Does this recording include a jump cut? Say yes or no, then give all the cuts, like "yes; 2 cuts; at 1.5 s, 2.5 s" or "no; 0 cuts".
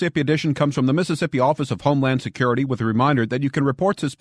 no; 0 cuts